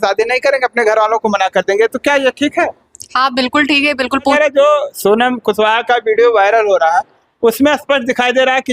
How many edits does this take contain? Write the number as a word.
one